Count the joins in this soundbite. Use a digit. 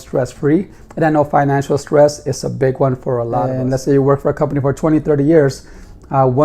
1